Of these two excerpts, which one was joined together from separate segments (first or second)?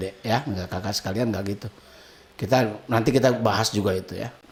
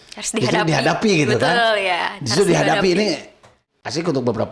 second